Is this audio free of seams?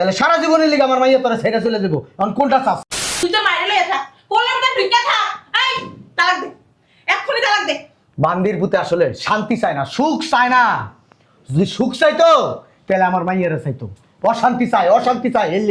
no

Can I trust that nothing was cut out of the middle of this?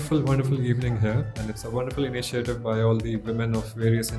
yes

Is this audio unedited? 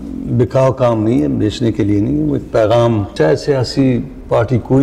no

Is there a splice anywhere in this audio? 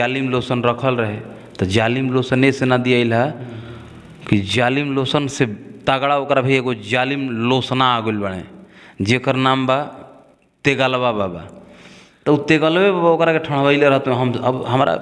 no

